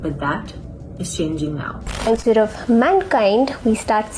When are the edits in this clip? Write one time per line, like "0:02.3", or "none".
0:02.1